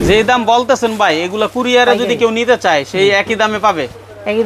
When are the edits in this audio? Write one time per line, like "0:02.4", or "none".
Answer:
none